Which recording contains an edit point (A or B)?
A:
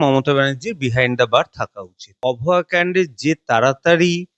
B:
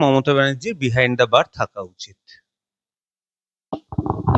A